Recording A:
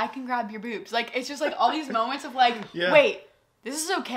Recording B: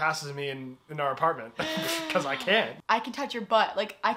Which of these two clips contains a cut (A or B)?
B